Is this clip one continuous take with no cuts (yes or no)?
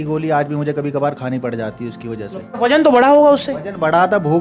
no